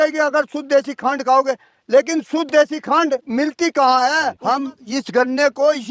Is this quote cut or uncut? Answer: cut